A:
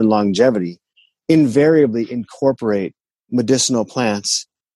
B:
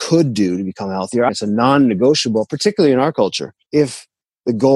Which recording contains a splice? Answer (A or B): B